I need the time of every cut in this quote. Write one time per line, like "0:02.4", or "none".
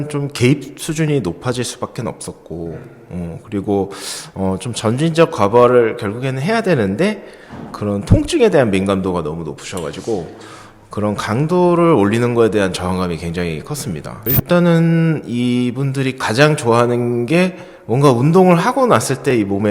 0:14.1